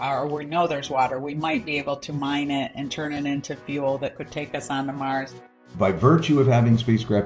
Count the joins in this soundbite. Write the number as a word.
one